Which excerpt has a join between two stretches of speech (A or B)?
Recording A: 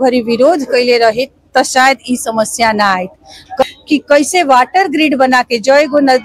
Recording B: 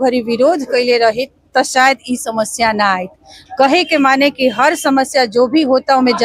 A